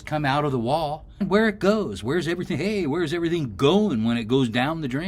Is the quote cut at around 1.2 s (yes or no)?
yes